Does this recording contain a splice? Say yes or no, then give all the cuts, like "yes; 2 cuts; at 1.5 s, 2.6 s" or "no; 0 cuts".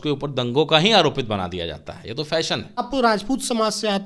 yes; 1 cut; at 2.8 s